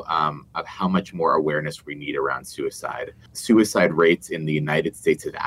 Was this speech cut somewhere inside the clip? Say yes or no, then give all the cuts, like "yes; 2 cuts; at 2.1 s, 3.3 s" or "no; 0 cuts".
yes; 1 cut; at 3.2 s